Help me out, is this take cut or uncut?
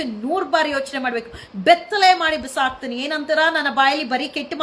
uncut